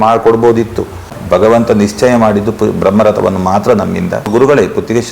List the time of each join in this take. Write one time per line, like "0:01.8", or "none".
0:01.1
0:04.3